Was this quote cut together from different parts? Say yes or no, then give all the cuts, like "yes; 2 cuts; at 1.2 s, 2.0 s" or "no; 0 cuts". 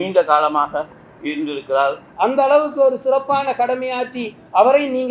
yes; 1 cut; at 2.0 s